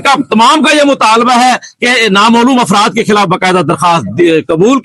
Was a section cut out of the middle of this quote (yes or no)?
no